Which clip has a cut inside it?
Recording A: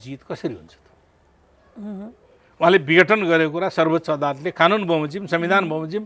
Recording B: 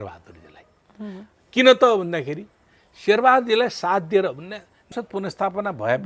B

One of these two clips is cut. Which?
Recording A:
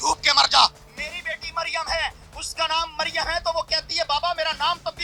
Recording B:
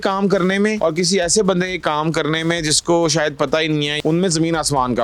B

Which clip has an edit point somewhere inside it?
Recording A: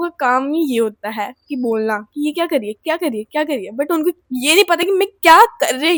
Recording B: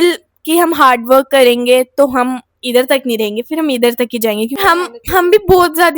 B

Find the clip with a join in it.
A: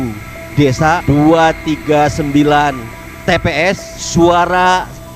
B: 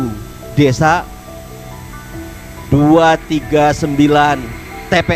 A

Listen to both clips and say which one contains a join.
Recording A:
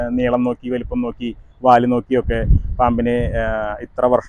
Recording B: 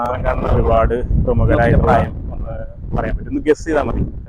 B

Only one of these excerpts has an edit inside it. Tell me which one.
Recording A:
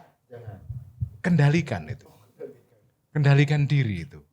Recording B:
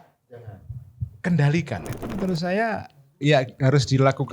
B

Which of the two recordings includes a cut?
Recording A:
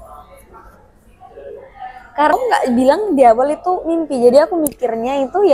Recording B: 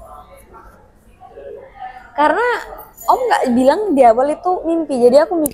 A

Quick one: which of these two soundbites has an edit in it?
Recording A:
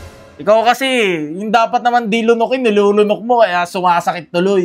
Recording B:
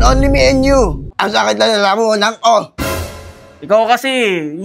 B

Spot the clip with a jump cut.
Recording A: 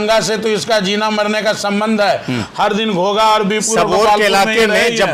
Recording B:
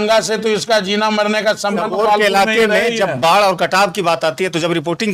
B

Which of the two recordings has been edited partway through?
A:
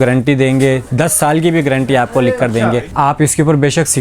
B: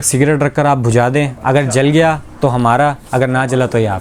A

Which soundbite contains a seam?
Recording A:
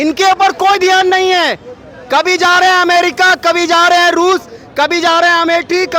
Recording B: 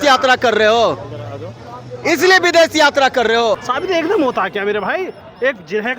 B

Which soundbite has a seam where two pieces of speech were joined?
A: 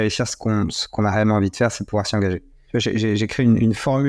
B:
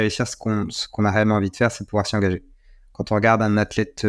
A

